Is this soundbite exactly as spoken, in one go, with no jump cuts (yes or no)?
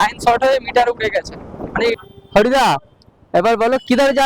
no